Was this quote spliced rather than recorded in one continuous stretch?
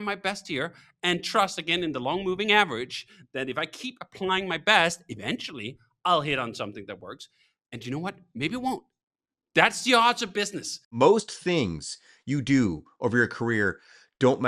yes; 1 cut; at 10.8 s

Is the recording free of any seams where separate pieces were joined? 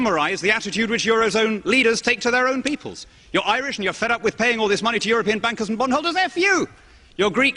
no; 1 cut; at 2.6 s

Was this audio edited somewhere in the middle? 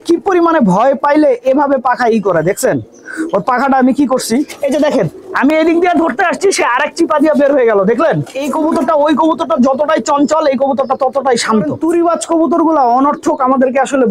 yes; 3 cuts; at 4.6 s, 8.4 s, 11.9 s

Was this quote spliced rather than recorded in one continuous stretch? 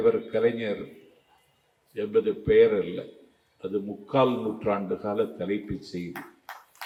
no; 0 cuts

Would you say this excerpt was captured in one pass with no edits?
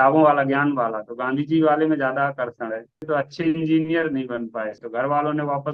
no; 2 cuts; at 3.0 s, 4.8 s

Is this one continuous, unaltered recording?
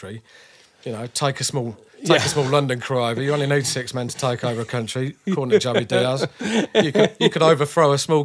yes; 0 cuts

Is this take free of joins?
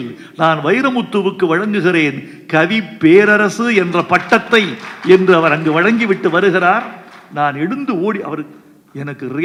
yes; 0 cuts

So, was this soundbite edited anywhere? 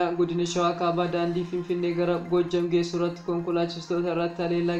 no; 0 cuts

